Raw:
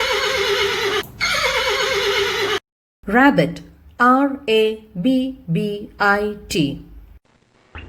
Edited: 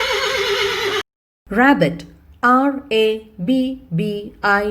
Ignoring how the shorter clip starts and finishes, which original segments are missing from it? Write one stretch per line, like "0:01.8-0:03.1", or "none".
0:01.1-0:02.7